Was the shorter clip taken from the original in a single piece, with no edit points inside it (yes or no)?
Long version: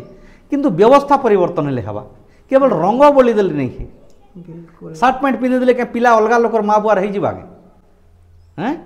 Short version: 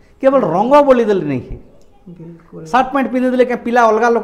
yes